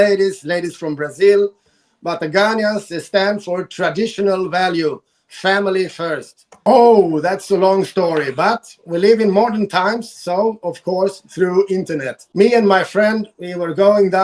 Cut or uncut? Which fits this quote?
cut